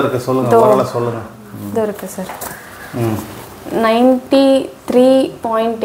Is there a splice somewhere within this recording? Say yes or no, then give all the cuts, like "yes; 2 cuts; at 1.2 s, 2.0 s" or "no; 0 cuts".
no; 0 cuts